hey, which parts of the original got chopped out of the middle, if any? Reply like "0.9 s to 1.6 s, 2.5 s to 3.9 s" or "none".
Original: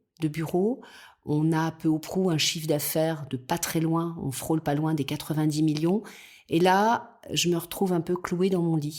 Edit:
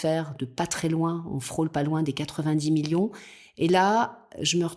none